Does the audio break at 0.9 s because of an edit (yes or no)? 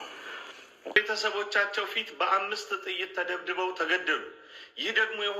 yes